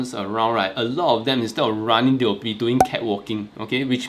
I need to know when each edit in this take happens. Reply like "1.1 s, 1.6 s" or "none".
none